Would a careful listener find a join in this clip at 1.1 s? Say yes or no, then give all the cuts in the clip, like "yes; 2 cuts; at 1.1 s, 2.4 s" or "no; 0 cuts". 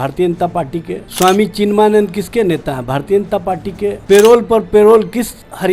yes; 2 cuts; at 1.1 s, 4.0 s